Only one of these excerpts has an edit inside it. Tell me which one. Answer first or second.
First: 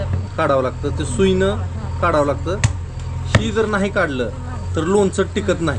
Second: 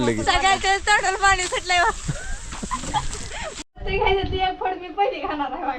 second